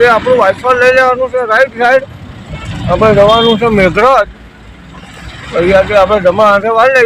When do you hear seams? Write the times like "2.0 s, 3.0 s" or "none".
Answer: none